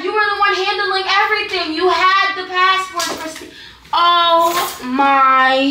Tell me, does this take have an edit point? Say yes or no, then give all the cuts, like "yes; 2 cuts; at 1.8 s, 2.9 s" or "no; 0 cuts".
no; 0 cuts